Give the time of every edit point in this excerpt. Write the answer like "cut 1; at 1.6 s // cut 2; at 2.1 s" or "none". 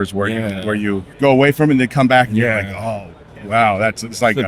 cut 1; at 1.1 s